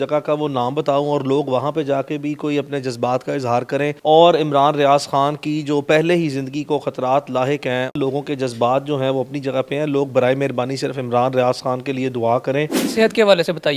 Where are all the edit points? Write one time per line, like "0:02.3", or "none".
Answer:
0:04.0
0:07.9
0:12.8